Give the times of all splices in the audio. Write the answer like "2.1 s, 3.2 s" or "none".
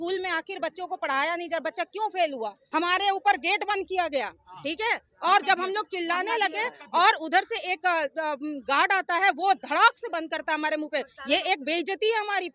2.6 s